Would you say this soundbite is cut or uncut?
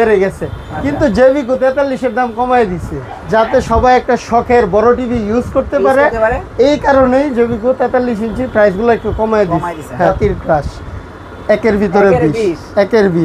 cut